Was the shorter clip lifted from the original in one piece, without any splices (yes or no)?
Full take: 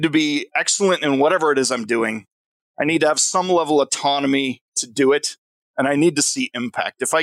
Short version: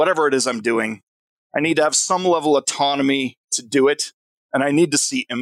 yes